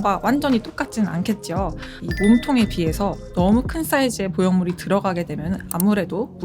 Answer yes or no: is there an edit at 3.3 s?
no